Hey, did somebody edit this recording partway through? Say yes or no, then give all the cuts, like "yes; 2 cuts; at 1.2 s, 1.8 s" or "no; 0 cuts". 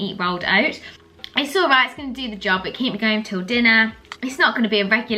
no; 0 cuts